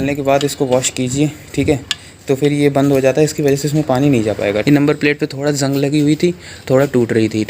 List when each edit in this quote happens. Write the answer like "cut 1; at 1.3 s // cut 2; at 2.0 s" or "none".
cut 1; at 4.6 s